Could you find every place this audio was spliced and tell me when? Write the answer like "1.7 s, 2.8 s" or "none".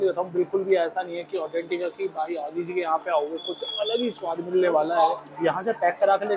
4.9 s